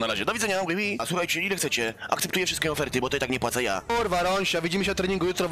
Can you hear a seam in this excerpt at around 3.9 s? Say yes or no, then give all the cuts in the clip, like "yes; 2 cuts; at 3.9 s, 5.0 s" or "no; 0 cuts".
yes; 2 cuts; at 1.0 s, 3.9 s